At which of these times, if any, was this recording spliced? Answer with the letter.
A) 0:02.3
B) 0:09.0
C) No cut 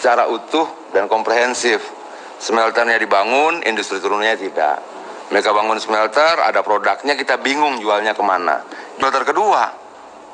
B